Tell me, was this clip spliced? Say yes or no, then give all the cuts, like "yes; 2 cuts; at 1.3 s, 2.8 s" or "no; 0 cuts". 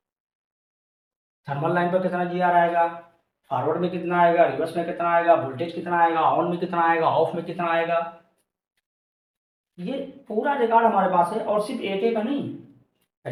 no; 0 cuts